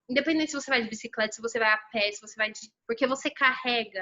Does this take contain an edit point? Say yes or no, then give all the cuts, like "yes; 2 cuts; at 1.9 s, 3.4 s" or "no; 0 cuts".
yes; 1 cut; at 2.7 s